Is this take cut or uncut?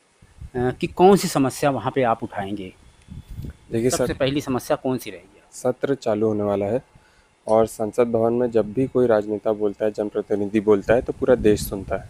uncut